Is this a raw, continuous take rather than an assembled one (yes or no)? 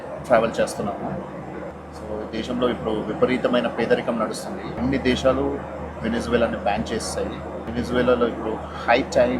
no